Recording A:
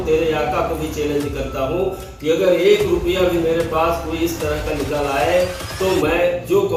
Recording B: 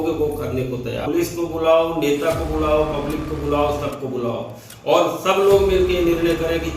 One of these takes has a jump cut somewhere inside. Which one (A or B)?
B